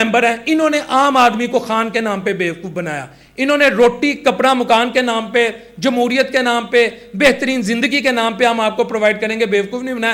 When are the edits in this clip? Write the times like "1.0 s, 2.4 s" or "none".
none

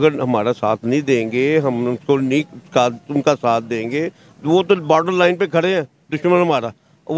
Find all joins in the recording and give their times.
none

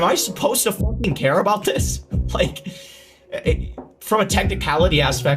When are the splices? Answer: none

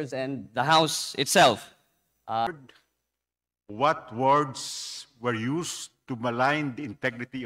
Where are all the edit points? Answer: 2.5 s

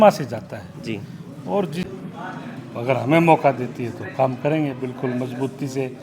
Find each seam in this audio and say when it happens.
1.9 s

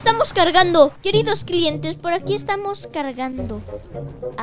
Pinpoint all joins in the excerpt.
1.0 s

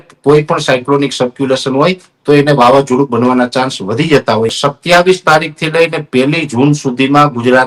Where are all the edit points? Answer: 4.6 s

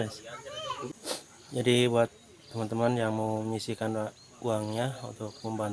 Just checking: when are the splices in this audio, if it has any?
0.9 s

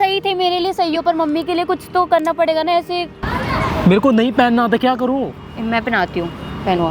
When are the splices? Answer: 3.2 s

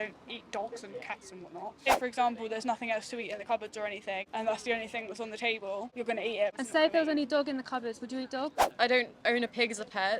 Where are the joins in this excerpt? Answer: 1.9 s, 4.3 s, 6.4 s, 8.6 s

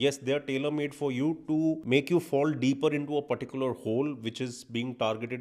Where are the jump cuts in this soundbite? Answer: 1.8 s

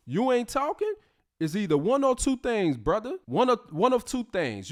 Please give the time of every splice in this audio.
none

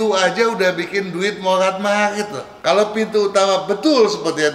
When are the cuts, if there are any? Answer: 2.4 s

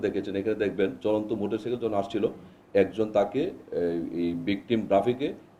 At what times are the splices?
none

